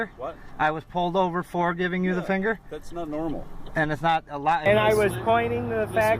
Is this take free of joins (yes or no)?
no